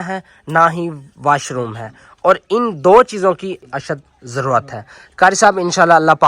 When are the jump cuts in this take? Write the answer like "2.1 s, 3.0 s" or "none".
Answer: 3.6 s